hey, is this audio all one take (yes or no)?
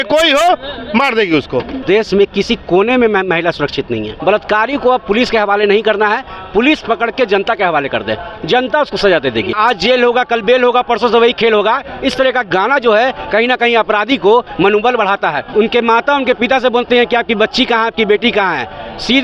no